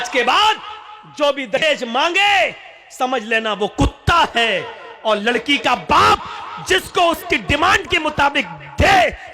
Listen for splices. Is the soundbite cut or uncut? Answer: cut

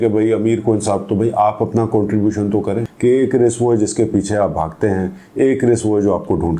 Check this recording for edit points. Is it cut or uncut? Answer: cut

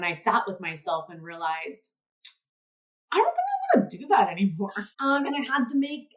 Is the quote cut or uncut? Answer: cut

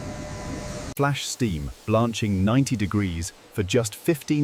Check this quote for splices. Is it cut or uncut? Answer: uncut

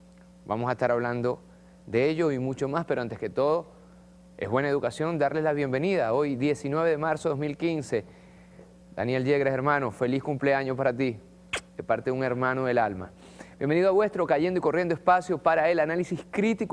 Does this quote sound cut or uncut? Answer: uncut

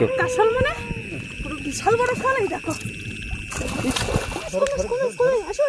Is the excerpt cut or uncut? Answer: cut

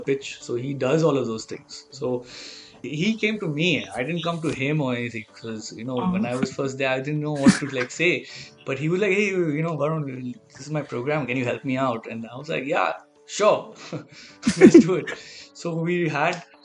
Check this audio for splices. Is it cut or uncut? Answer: cut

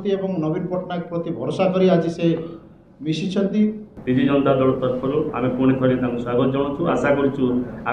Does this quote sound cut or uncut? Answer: cut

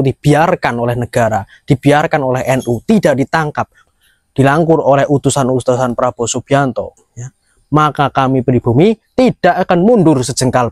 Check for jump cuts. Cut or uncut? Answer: uncut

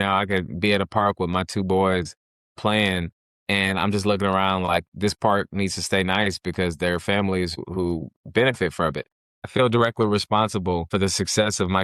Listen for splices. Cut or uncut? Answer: cut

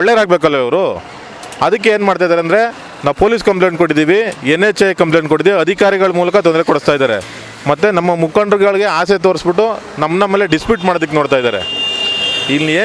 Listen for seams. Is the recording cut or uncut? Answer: uncut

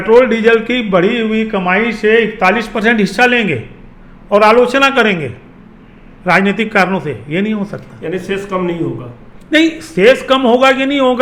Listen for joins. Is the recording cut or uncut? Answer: uncut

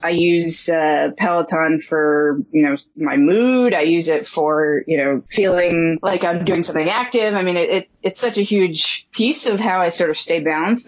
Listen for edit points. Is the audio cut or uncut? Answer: cut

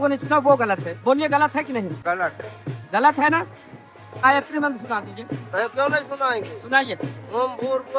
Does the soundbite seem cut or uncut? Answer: cut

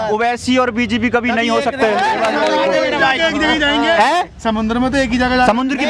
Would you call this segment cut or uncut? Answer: uncut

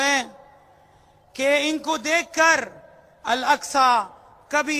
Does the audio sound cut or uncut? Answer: uncut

